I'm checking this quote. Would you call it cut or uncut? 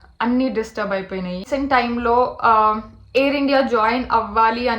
cut